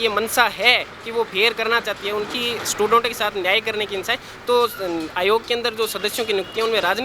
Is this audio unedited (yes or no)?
yes